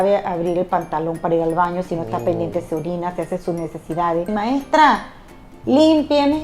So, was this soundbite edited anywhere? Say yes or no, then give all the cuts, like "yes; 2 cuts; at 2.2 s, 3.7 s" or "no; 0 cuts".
yes; 1 cut; at 4.3 s